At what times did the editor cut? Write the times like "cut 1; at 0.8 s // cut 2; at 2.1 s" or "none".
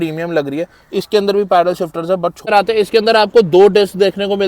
cut 1; at 2.4 s